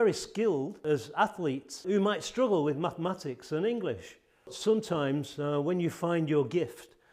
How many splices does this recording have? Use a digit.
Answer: 3